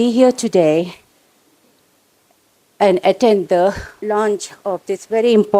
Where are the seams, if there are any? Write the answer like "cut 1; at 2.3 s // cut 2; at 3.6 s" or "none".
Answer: cut 1; at 3.9 s